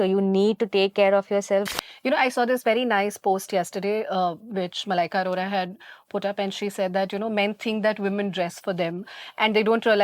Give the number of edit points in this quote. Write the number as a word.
one